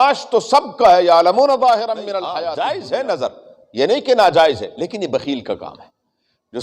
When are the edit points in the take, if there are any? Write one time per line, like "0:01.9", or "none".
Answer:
0:02.3